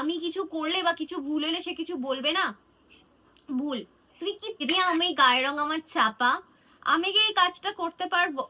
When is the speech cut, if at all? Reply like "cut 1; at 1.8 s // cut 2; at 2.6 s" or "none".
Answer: cut 1; at 4.6 s

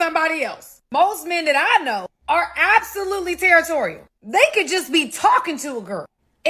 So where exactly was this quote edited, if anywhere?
cut 1; at 4.7 s

